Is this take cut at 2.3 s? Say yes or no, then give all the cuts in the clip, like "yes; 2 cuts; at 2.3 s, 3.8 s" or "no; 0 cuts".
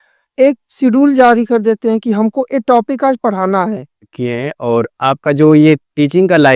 no; 1 cut; at 4.0 s